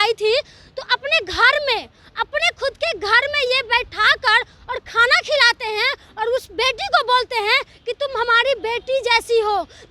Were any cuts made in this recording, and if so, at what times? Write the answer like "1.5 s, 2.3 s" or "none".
none